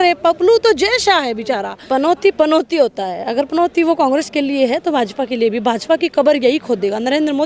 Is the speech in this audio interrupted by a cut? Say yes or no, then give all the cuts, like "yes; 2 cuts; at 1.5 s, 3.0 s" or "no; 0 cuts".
yes; 1 cut; at 1.7 s